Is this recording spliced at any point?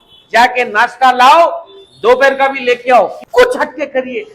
yes; 1 cut; at 3.2 s

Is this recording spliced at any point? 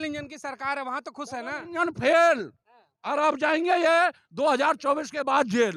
no; 0 cuts

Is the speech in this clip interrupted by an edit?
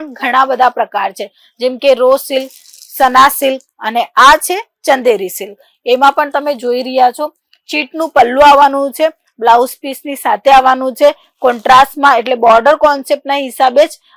no; 0 cuts

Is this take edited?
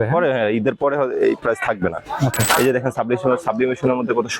yes; 1 cut; at 2.4 s

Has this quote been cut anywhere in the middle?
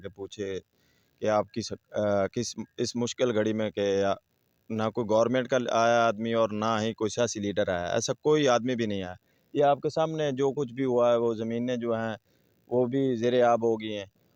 no; 0 cuts

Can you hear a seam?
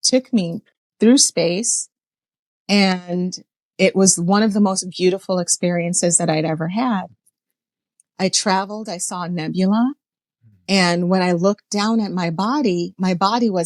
no; 0 cuts

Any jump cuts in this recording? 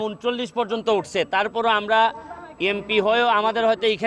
no; 0 cuts

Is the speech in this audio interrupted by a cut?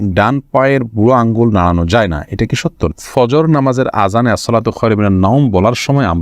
yes; 1 cut; at 2.9 s

